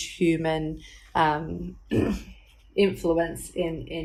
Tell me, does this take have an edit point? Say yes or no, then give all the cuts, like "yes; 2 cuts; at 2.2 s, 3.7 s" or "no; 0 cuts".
no; 0 cuts